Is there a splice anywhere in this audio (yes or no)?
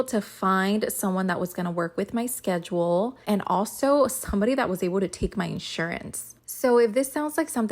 yes